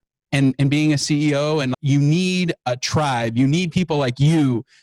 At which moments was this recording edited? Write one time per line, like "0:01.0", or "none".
0:01.7